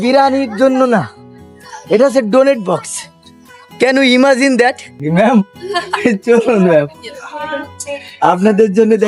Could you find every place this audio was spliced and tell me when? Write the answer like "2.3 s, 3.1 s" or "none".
5.0 s